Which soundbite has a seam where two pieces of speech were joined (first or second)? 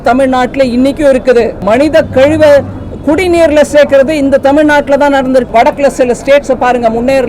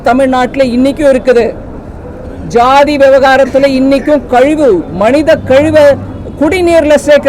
first